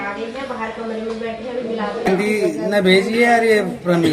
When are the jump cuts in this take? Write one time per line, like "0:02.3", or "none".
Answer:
0:02.1

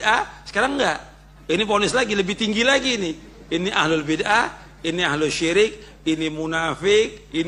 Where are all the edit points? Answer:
none

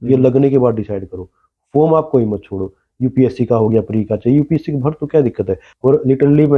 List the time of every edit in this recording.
0:05.6

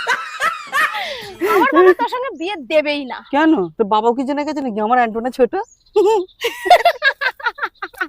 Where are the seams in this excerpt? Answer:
0:01.1

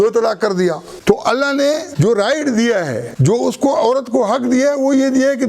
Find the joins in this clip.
0:00.9
0:01.9
0:03.1

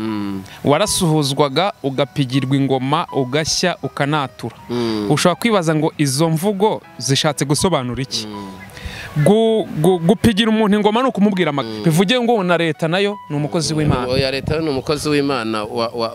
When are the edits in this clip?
0:11.7

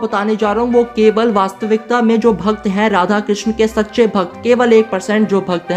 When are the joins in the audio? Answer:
none

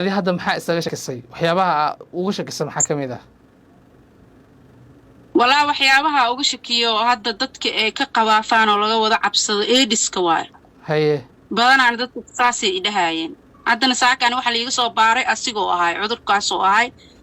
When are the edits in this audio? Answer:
0:00.9

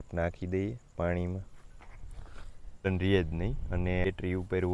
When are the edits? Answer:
0:02.9
0:04.1

